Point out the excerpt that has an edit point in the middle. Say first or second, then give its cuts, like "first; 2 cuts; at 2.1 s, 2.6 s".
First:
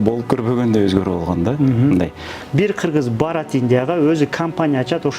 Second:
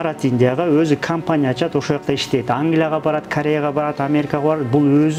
first; 1 cut; at 2.3 s